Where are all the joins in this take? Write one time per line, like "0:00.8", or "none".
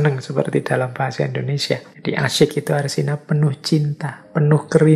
0:01.9